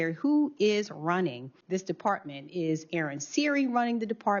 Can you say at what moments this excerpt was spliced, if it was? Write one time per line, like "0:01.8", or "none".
0:01.5